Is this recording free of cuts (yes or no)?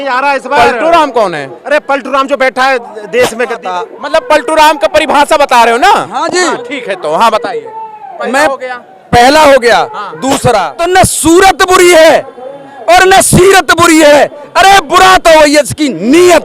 no